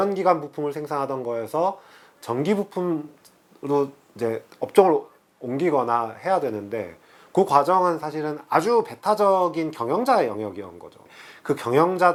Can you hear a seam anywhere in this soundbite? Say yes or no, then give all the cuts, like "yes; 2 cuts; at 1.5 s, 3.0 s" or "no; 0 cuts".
no; 0 cuts